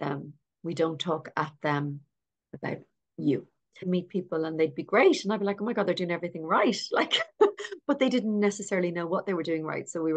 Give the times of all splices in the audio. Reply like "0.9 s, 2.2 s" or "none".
3.9 s